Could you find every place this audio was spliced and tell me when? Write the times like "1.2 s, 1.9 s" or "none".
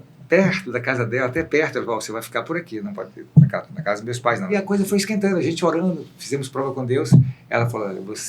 4.5 s